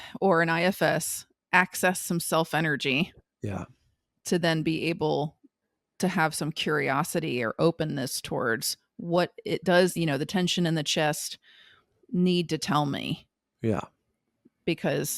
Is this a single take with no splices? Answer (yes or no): no